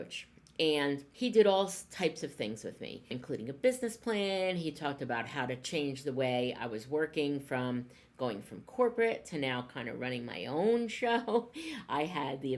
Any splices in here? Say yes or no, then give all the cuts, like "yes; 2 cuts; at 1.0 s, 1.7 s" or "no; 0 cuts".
yes; 2 cuts; at 1.1 s, 3.1 s